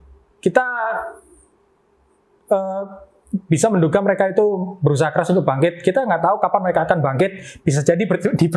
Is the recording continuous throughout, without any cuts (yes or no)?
yes